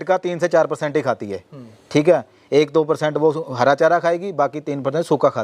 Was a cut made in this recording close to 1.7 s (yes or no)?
no